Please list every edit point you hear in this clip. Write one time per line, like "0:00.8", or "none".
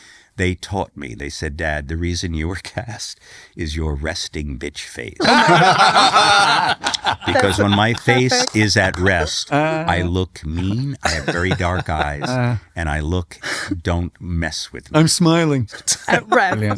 0:15.7